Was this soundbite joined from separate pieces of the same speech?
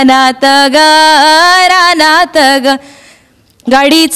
no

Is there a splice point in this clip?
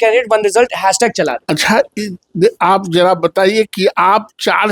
yes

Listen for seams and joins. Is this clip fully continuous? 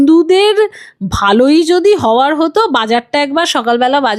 yes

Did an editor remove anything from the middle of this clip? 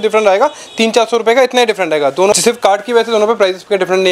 no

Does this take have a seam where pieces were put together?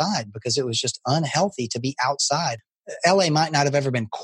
yes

